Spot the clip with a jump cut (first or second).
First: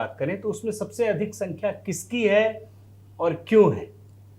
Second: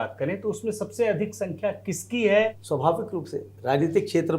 second